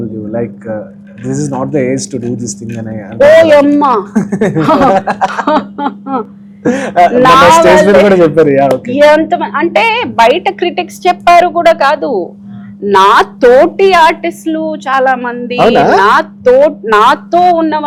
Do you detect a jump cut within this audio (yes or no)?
no